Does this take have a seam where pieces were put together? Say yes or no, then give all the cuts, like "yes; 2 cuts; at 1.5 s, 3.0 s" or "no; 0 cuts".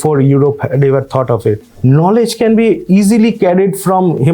yes; 1 cut; at 1.7 s